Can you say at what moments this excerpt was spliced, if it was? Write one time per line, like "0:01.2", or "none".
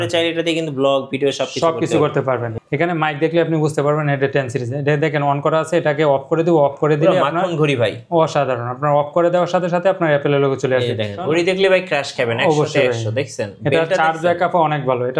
0:02.5
0:11.2